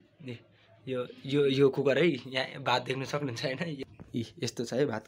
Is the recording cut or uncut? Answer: cut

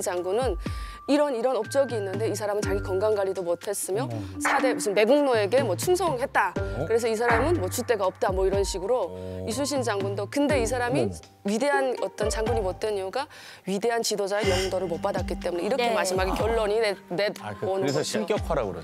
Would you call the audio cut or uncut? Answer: uncut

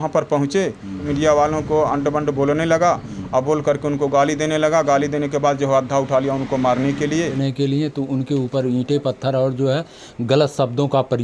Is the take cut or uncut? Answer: cut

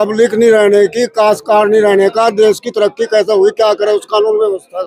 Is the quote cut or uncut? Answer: uncut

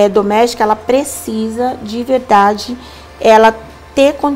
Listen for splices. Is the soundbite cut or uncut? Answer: uncut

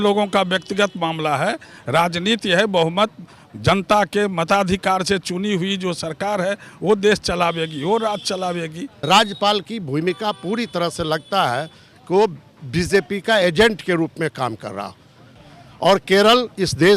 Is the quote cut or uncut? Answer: cut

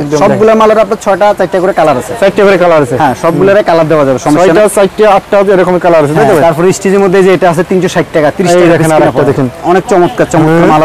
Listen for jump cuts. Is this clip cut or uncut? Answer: uncut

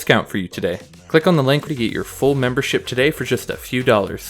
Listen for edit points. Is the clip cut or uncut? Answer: cut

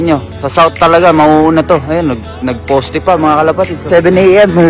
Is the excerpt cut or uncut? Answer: cut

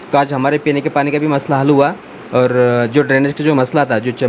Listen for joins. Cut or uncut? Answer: uncut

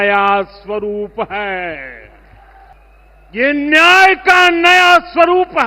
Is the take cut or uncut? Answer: cut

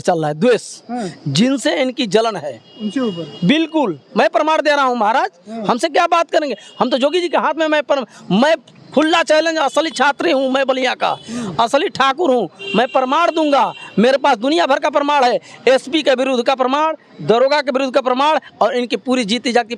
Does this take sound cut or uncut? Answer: uncut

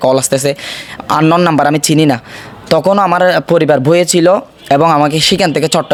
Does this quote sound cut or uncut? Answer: uncut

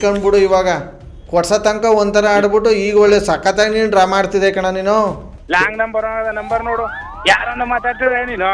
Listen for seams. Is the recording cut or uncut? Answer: cut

